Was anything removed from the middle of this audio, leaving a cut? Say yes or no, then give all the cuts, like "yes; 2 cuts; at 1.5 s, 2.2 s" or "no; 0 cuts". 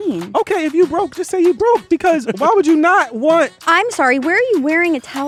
no; 0 cuts